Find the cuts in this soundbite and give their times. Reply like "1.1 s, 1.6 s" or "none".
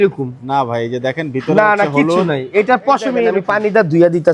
3.4 s